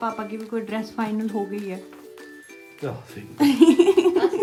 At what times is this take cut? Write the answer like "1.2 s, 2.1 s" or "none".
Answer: none